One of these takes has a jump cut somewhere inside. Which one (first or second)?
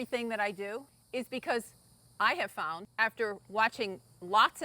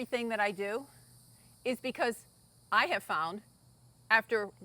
first